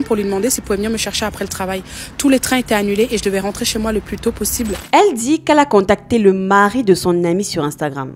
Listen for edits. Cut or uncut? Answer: uncut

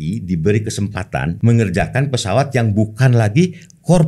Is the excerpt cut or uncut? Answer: cut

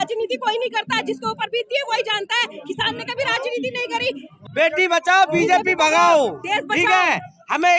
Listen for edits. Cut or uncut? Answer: cut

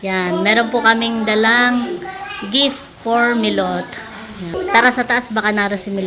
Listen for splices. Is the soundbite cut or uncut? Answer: cut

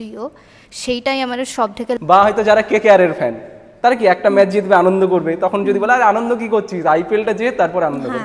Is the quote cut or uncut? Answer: cut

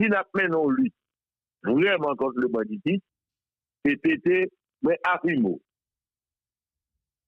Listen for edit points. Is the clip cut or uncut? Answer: uncut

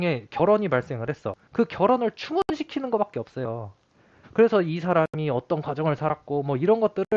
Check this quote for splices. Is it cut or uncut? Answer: uncut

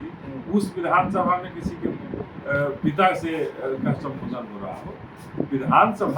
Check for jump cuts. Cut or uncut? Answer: uncut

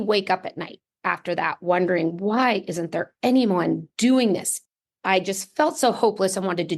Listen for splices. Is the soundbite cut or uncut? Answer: cut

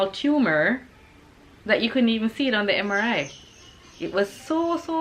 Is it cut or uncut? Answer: uncut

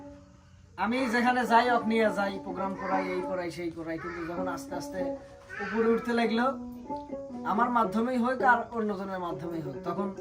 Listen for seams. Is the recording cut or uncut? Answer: uncut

